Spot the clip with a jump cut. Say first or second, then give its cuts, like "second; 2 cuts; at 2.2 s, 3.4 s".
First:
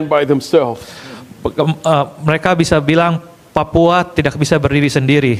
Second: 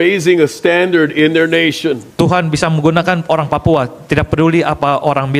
second; 1 cut; at 2.1 s